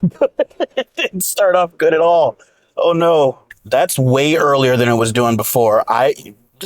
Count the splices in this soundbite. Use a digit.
1